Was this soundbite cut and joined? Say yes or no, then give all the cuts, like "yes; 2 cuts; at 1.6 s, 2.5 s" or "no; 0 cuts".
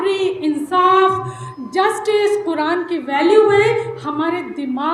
no; 0 cuts